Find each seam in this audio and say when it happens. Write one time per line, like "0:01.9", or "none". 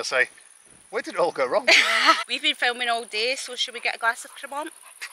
0:02.2